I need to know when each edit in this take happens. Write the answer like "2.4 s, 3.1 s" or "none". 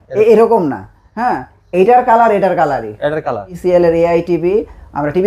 3.5 s